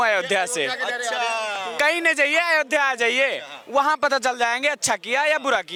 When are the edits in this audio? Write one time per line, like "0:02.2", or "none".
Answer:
none

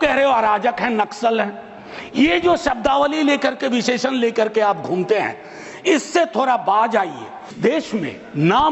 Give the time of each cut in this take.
0:07.5

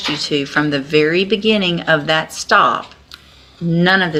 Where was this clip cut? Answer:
none

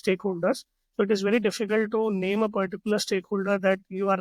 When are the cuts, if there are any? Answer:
none

